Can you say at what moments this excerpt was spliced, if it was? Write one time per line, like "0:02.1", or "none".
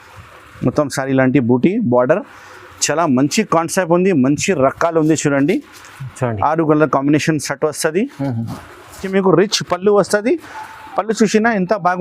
0:09.0